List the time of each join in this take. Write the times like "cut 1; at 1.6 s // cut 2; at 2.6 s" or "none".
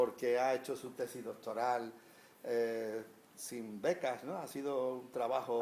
none